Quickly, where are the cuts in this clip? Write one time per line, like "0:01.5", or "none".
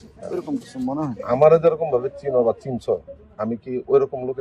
none